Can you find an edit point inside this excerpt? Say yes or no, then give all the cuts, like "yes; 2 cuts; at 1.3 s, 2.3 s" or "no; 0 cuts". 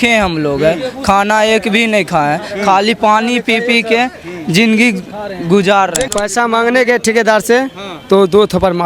yes; 1 cut; at 6.1 s